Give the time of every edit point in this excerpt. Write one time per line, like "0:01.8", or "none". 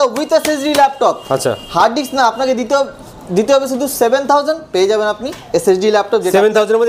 none